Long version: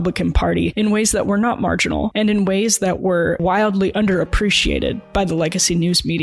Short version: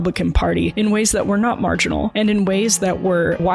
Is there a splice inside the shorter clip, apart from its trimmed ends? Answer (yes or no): no